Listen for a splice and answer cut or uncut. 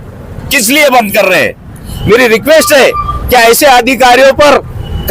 cut